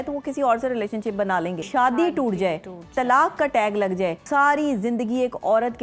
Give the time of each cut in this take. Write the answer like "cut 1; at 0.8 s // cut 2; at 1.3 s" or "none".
cut 1; at 1.6 s // cut 2; at 4.2 s